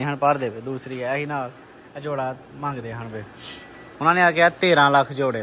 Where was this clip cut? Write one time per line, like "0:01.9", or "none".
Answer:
none